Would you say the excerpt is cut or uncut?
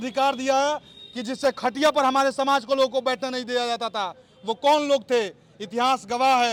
uncut